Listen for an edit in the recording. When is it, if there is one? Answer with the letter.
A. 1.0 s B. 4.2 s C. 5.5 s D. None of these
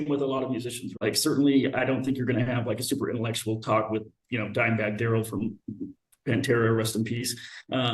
A